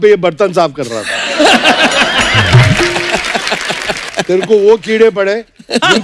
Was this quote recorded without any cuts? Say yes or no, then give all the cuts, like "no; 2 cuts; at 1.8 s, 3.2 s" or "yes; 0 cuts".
no; 1 cut; at 4.1 s